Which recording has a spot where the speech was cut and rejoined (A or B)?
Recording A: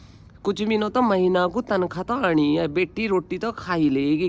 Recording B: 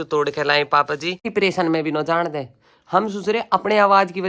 B